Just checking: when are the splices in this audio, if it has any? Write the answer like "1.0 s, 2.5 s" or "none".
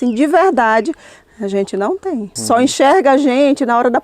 2.3 s